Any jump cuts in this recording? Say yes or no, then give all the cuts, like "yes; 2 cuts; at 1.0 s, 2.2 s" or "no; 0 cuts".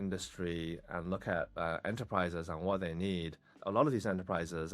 no; 0 cuts